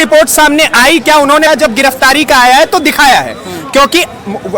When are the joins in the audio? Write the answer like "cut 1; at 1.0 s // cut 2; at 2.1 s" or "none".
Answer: cut 1; at 1.5 s